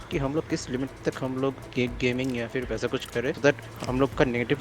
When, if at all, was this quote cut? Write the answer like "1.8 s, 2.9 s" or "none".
3.4 s